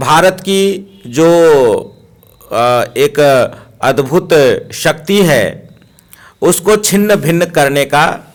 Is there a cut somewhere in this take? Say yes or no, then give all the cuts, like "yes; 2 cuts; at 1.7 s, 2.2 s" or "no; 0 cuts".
no; 0 cuts